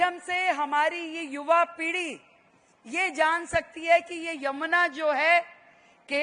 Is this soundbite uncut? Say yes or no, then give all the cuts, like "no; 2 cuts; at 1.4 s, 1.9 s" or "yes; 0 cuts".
yes; 0 cuts